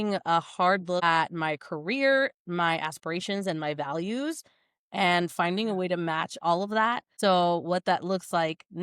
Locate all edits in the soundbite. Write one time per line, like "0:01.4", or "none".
0:01.0
0:07.1